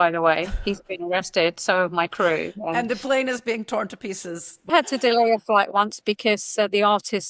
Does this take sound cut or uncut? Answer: cut